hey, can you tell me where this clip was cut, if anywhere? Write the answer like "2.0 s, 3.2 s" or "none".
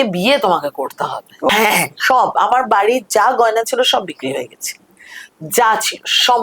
1.5 s